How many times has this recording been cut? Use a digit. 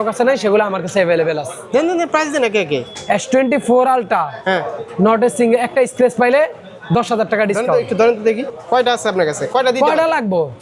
0